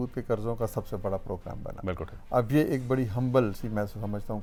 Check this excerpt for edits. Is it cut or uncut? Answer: uncut